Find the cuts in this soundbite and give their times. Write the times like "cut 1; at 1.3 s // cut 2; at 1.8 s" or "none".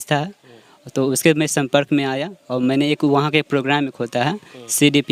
none